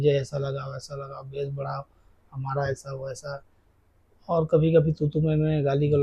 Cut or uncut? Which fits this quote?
uncut